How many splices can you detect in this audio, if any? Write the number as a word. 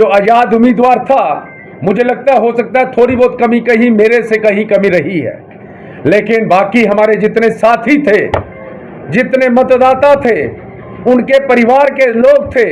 zero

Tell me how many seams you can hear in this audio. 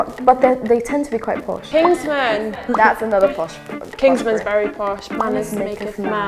two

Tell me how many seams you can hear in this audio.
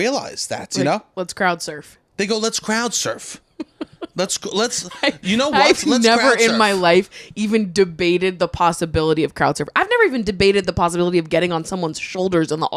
zero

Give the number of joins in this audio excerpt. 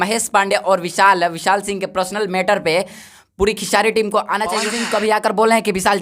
one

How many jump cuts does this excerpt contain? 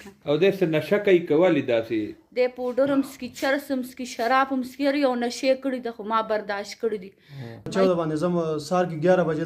one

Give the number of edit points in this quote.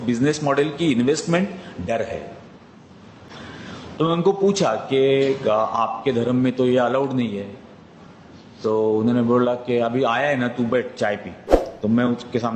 one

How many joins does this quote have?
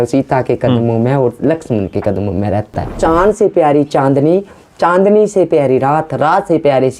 one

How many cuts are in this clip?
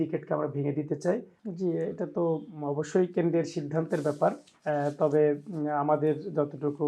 two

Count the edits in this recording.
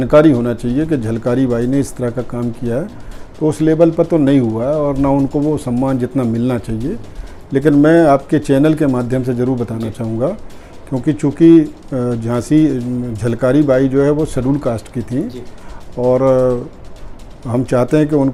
zero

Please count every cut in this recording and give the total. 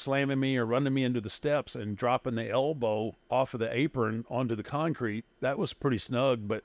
two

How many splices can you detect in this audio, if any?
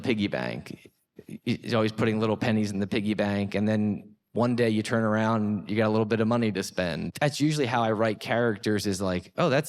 one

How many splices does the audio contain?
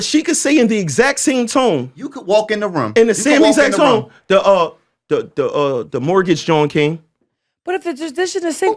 zero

